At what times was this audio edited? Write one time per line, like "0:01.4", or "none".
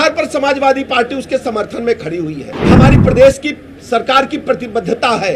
0:02.8